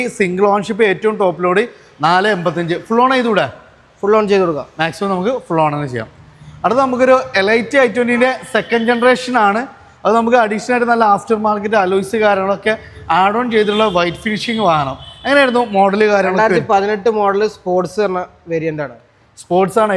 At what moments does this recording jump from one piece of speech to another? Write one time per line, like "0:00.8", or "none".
none